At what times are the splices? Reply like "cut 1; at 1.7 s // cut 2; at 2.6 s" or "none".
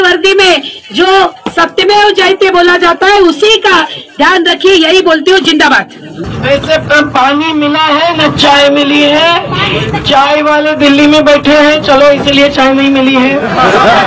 cut 1; at 6.1 s